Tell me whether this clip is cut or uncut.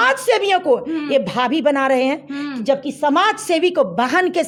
uncut